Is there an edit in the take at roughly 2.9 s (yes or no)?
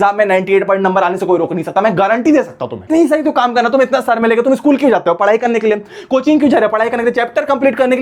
yes